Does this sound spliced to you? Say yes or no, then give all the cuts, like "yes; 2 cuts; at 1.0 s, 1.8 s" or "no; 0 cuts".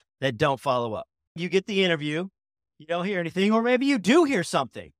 yes; 2 cuts; at 1.4 s, 2.7 s